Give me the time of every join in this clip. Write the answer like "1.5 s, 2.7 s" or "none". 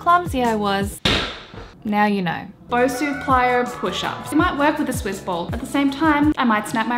1.7 s, 2.7 s, 4.3 s